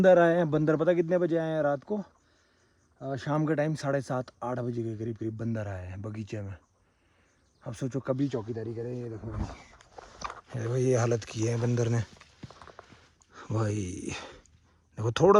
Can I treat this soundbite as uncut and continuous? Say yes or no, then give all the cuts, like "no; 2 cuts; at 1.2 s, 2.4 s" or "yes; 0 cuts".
yes; 0 cuts